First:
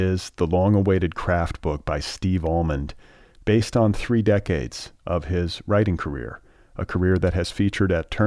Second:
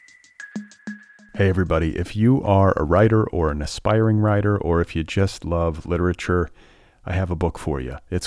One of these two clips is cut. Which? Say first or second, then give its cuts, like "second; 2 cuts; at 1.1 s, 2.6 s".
second; 1 cut; at 0.9 s